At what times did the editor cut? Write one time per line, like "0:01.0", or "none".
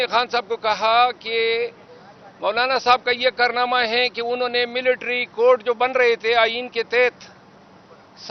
none